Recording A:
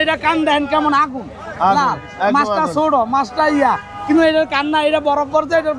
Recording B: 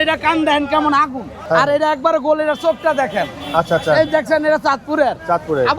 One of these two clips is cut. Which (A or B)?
B